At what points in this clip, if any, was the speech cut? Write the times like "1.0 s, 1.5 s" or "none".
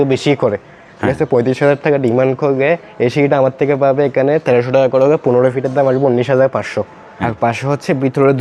7.0 s